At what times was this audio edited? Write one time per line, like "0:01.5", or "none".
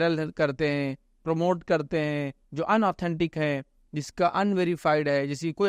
none